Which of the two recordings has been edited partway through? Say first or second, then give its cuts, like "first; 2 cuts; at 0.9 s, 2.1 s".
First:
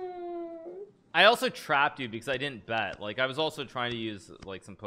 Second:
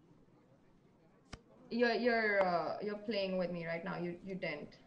first; 1 cut; at 0.9 s